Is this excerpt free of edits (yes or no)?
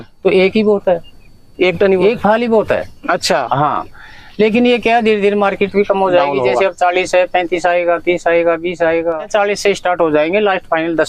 yes